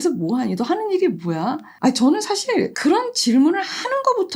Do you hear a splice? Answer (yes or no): yes